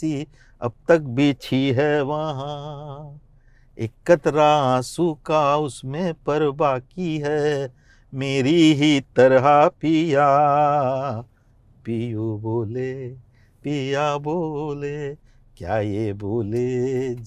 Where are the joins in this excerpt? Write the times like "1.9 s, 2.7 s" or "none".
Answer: none